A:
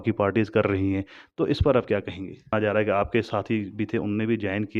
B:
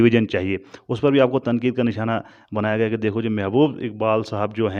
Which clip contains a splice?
A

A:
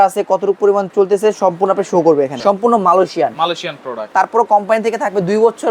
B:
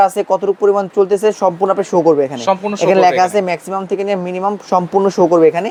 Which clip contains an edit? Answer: A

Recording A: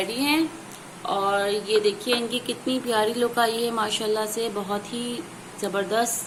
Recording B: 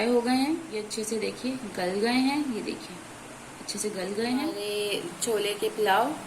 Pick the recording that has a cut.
B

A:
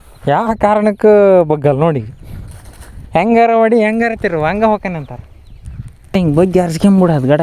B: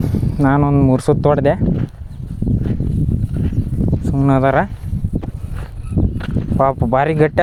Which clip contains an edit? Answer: A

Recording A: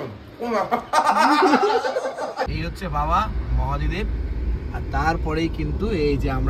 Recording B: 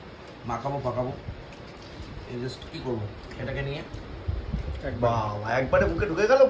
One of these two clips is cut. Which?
A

